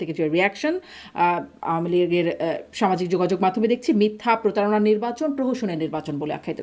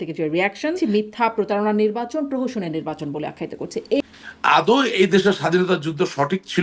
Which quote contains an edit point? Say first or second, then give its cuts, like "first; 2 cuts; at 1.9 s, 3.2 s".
second; 2 cuts; at 0.8 s, 4.0 s